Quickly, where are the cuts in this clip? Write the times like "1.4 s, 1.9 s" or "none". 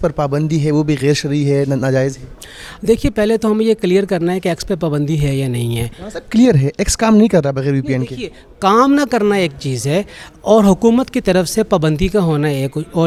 none

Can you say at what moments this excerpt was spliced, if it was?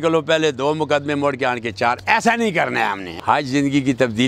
3.2 s

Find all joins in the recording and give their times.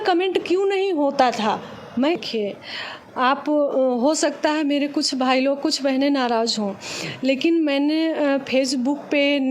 2.2 s

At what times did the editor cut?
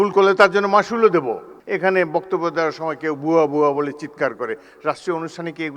1.5 s

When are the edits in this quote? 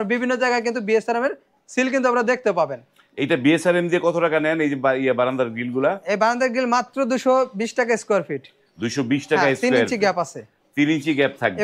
none

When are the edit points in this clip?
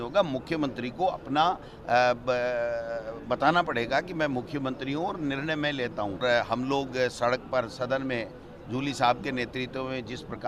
6.2 s

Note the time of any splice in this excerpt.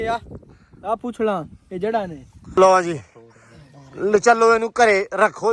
2.6 s

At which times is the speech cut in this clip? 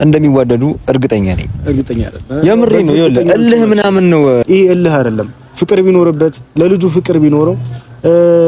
4.4 s

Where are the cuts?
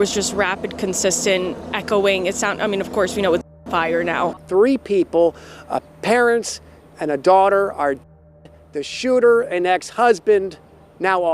4.4 s

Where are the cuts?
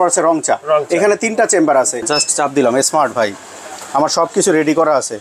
2.0 s

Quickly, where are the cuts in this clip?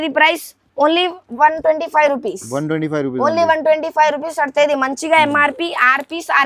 none

